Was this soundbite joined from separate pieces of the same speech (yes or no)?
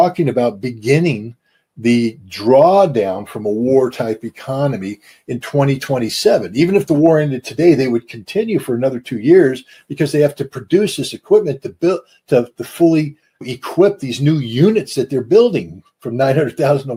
no